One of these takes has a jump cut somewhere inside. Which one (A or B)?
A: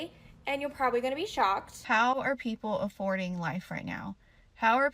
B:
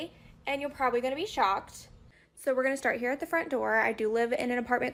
A